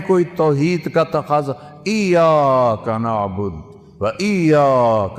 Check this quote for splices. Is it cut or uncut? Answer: uncut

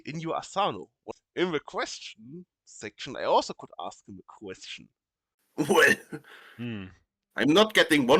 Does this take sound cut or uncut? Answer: cut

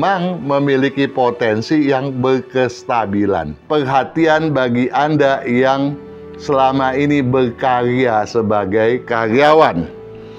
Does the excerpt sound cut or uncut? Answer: cut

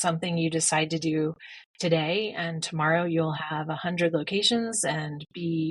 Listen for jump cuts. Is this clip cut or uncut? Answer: uncut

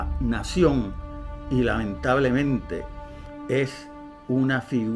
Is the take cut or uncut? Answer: cut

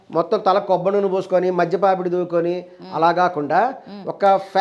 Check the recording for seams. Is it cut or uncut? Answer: uncut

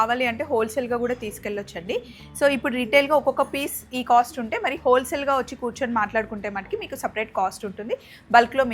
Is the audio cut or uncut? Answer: uncut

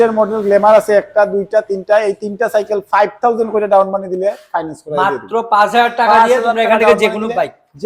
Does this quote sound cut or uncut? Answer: uncut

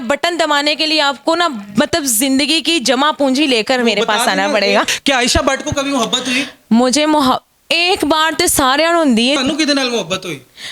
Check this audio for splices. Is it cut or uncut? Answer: cut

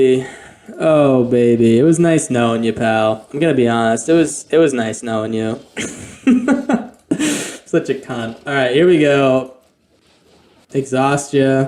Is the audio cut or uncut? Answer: uncut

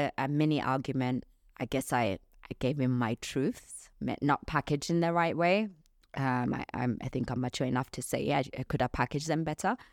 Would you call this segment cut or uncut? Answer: uncut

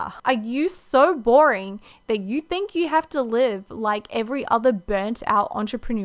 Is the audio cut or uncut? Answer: uncut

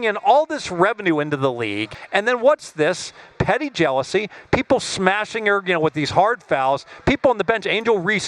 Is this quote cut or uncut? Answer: cut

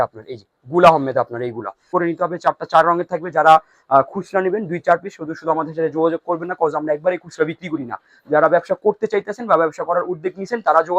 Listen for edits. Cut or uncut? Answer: cut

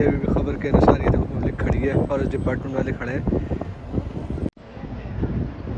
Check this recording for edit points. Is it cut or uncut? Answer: uncut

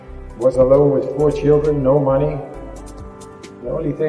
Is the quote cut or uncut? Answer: uncut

